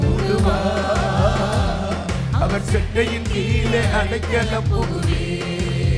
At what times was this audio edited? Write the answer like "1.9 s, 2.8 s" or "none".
none